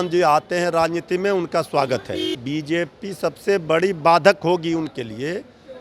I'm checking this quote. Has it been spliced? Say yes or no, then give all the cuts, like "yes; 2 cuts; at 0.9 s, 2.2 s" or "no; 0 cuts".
yes; 1 cut; at 2.4 s